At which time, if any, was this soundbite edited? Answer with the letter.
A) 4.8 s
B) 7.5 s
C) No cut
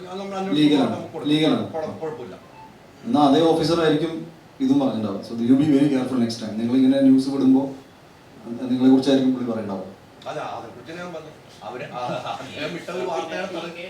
C